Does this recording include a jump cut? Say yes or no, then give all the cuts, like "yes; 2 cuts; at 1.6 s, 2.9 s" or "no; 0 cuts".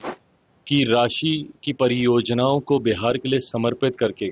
no; 0 cuts